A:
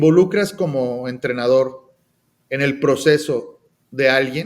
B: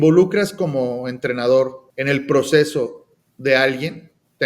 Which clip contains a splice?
B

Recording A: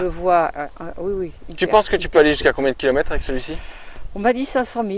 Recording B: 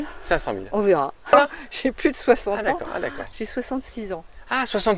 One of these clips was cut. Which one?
B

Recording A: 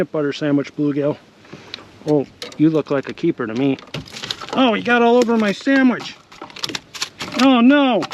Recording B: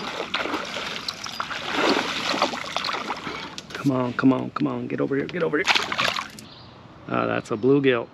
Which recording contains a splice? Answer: B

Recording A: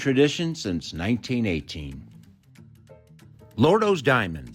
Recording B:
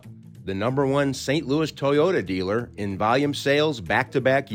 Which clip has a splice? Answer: A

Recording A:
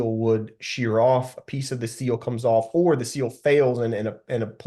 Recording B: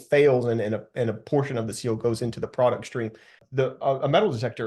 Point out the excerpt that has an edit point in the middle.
B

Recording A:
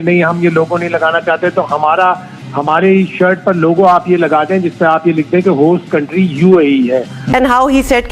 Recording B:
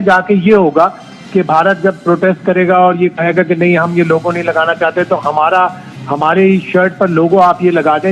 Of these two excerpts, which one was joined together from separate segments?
A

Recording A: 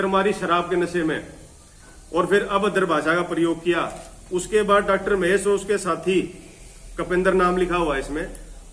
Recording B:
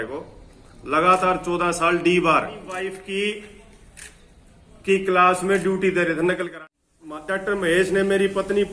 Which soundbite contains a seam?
B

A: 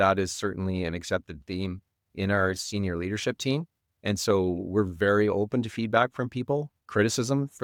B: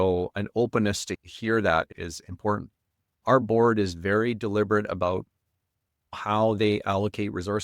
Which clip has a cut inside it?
B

